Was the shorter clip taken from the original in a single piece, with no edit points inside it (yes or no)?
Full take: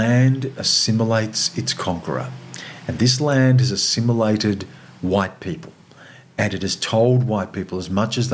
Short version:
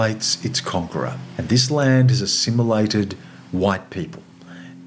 no